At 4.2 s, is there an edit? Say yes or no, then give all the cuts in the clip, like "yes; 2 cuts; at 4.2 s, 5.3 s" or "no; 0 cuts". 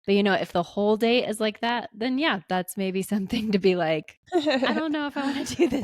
yes; 1 cut; at 4.2 s